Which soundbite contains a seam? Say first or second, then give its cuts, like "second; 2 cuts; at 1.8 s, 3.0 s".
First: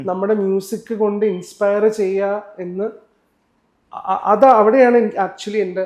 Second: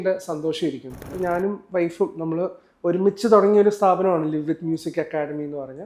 second; 1 cut; at 1.1 s